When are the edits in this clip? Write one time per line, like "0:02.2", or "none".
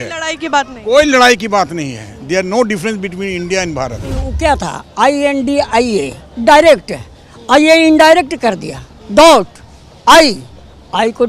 0:04.3